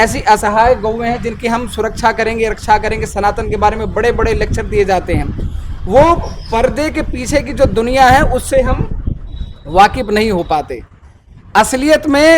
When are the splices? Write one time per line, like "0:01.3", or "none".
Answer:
none